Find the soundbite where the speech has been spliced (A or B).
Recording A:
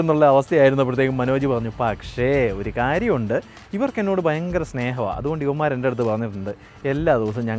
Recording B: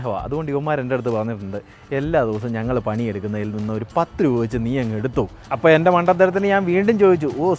B